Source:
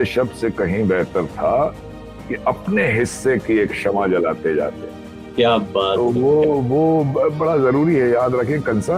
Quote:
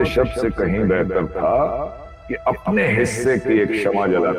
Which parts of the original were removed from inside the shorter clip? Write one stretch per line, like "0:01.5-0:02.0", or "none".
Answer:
none